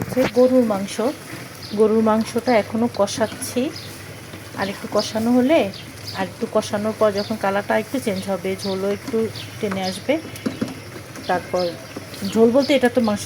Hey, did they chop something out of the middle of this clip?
no; 0 cuts

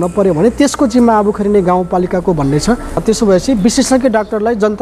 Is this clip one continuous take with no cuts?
no; 1 cut; at 3.0 s

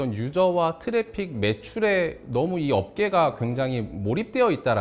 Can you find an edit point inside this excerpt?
no; 0 cuts

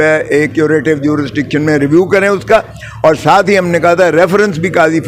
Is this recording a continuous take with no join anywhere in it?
yes; 0 cuts

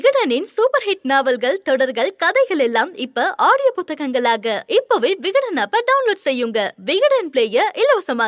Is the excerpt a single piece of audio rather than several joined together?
yes; 0 cuts

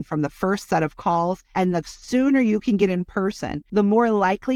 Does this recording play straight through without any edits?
no; 2 cuts; at 1.4 s, 3.6 s

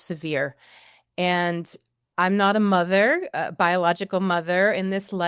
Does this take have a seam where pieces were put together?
no; 0 cuts

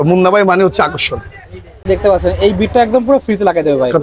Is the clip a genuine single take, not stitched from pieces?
yes; 0 cuts

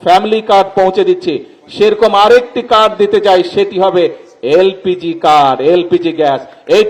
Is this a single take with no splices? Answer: yes; 0 cuts

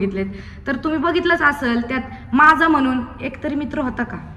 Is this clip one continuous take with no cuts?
yes; 0 cuts

